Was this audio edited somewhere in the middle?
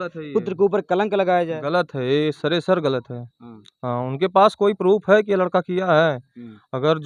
no; 0 cuts

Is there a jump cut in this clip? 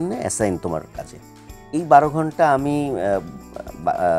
no; 0 cuts

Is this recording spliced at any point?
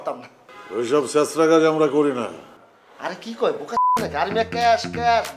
no; 0 cuts

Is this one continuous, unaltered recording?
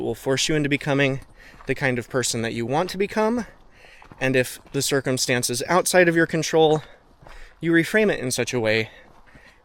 yes; 0 cuts

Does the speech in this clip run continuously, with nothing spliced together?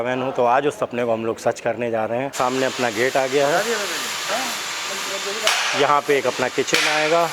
no; 1 cut; at 2.3 s

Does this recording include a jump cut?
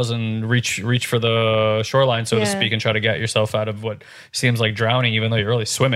no; 0 cuts

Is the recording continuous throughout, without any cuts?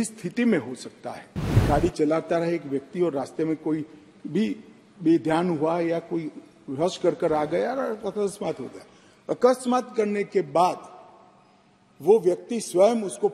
no; 1 cut; at 1.6 s

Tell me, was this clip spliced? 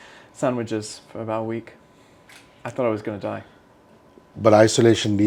no; 0 cuts

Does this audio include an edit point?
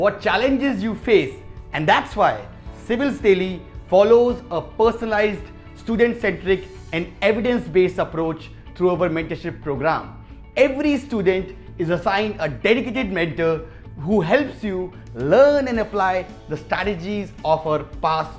no; 0 cuts

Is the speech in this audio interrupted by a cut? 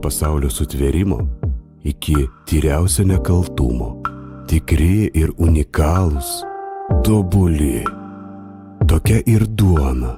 no; 0 cuts

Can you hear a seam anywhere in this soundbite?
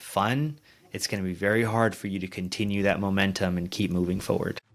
no; 0 cuts

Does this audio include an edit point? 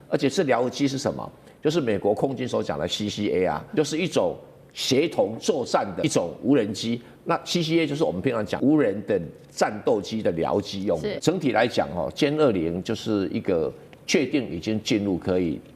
yes; 4 cuts; at 3.6 s, 6.0 s, 8.5 s, 11.2 s

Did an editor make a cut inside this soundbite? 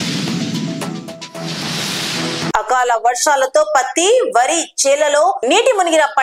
no; 0 cuts

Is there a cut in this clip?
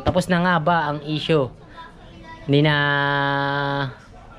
no; 0 cuts

